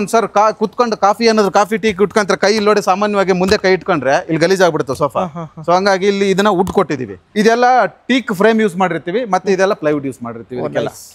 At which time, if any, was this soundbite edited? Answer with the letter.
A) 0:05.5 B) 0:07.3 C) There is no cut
B